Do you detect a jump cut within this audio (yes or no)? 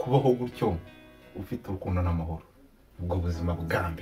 no